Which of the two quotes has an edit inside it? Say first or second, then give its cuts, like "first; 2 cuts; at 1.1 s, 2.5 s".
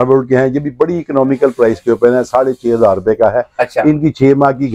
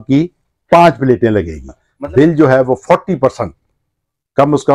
second; 1 cut; at 1.9 s